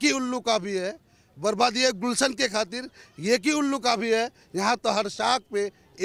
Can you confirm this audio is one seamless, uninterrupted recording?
yes; 0 cuts

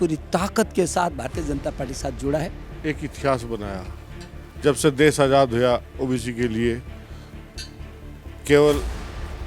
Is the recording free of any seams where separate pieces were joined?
no; 1 cut; at 2.7 s

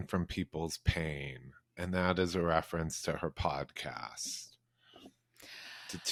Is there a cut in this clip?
no; 0 cuts

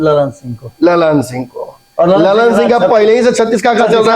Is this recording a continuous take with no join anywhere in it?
yes; 0 cuts

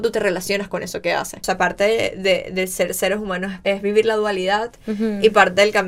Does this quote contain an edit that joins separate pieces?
yes; 2 cuts; at 1.4 s, 3.6 s

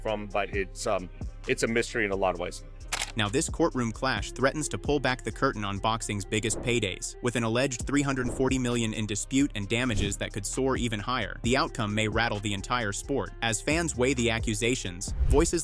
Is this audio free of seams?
yes; 0 cuts

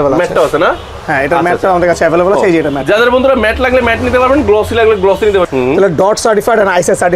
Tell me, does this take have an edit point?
yes; 1 cut; at 5.5 s

